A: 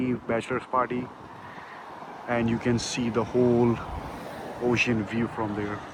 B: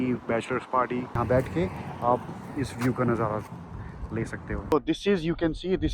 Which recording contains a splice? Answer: B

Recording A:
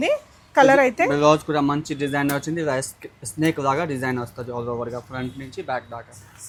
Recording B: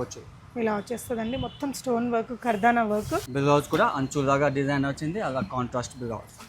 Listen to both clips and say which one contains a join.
B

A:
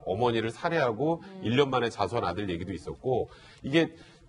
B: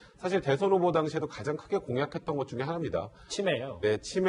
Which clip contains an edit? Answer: B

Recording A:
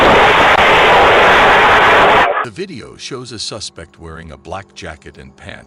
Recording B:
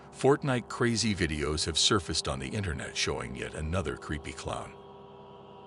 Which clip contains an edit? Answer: A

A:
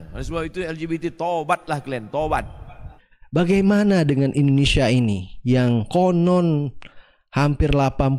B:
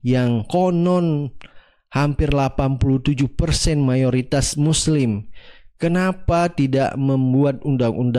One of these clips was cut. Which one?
A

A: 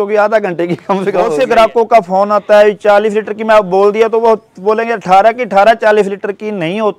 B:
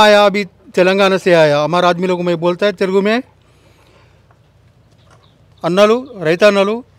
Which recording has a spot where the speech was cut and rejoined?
A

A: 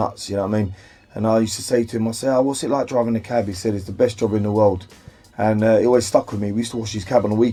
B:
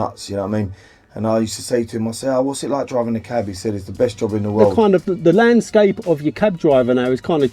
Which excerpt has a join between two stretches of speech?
B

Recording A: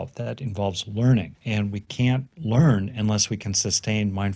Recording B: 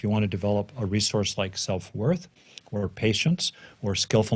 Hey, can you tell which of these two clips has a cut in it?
A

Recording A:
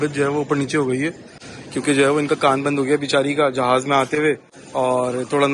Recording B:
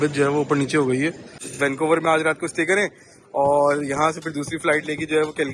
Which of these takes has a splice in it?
B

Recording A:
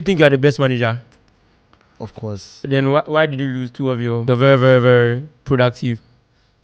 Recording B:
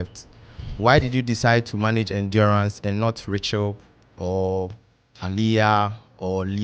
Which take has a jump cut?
A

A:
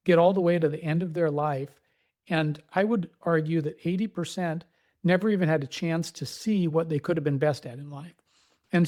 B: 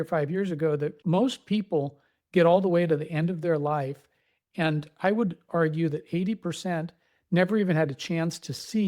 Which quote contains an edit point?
B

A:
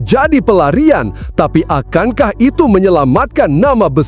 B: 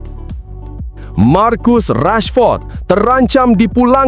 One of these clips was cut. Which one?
B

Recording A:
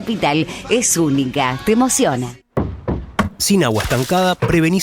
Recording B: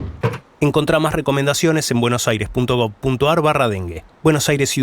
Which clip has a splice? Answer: A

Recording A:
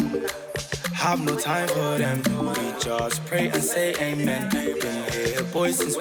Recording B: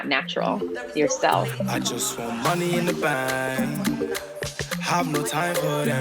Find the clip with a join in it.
B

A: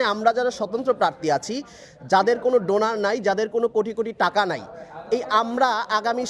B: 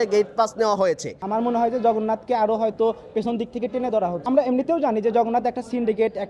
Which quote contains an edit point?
B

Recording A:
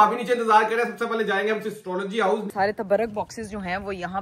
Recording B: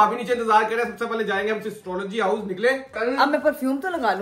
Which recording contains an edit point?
A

